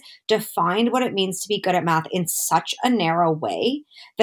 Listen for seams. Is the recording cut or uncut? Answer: uncut